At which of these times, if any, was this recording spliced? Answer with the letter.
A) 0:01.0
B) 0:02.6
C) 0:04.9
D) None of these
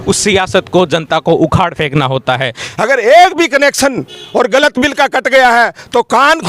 B